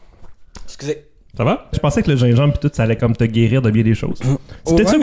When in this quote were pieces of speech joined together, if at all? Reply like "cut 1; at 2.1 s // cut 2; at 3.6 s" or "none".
cut 1; at 1.8 s